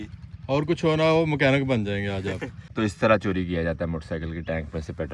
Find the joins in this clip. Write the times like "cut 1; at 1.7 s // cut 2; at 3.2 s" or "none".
cut 1; at 2.6 s